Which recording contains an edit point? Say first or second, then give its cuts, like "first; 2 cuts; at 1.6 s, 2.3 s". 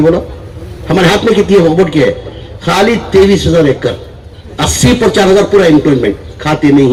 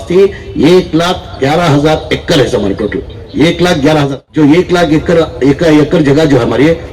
second; 1 cut; at 4.2 s